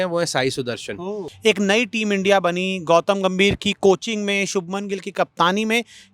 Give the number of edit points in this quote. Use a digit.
1